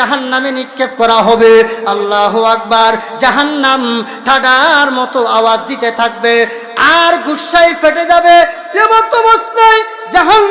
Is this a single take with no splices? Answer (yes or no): yes